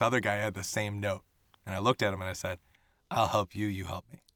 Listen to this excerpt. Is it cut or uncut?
uncut